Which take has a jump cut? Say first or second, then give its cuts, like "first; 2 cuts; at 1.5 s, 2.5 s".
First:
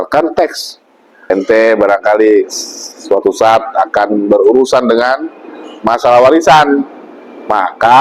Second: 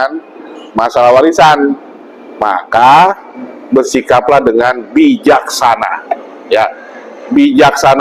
first; 1 cut; at 1.3 s